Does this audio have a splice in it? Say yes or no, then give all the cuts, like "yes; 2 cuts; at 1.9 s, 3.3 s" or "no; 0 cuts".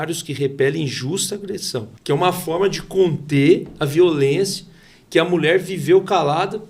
yes; 1 cut; at 1.9 s